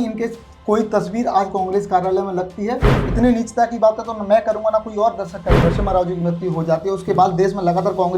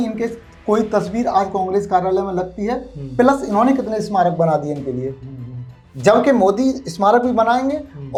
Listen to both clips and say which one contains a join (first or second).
first